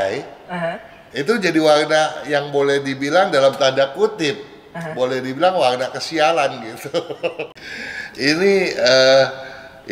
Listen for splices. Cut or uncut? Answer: cut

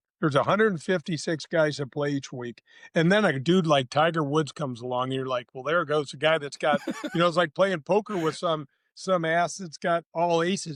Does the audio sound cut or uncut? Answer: uncut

